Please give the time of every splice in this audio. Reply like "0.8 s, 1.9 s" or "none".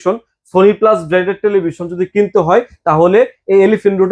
none